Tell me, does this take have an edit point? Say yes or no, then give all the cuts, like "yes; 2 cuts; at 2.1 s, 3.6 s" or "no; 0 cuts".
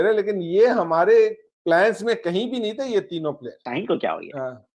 yes; 1 cut; at 3.6 s